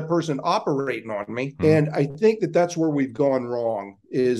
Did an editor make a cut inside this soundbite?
yes; 1 cut; at 1.5 s

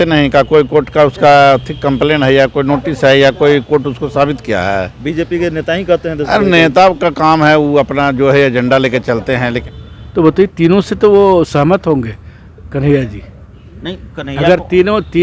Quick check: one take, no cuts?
no; 1 cut; at 9.7 s

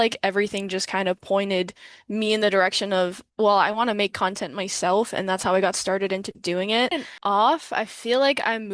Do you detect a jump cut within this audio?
yes; 1 cut; at 6.9 s

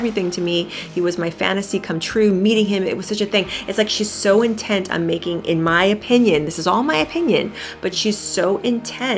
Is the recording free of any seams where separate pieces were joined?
yes; 0 cuts

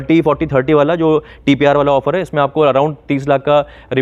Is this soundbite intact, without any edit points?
yes; 0 cuts

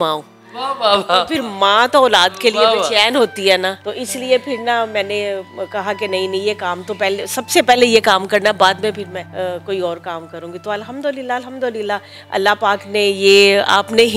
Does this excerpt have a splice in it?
yes; 2 cuts; at 3.9 s, 9.2 s

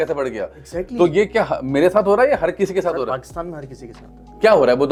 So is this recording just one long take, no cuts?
yes; 0 cuts

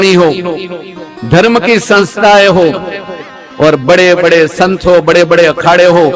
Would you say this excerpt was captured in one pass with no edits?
yes; 0 cuts

